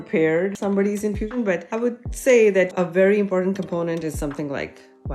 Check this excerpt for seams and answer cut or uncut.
cut